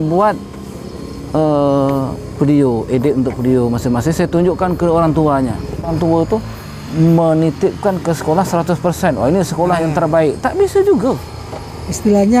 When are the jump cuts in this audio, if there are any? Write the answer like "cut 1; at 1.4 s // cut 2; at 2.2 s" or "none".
cut 1; at 5.9 s